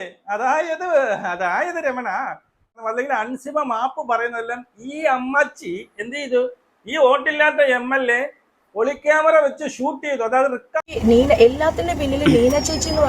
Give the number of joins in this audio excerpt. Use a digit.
2